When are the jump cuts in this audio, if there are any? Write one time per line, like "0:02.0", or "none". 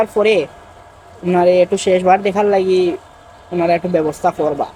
none